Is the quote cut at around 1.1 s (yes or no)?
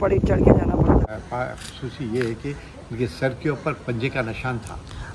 yes